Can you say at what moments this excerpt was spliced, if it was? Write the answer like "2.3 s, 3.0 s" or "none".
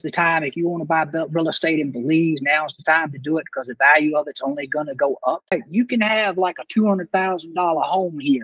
5.5 s